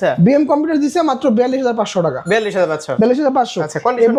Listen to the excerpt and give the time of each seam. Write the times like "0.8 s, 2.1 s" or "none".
none